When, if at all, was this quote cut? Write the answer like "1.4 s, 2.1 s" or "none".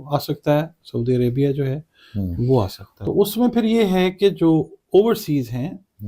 2.9 s